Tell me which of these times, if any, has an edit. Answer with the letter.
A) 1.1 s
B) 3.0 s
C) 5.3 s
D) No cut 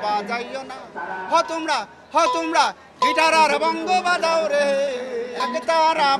C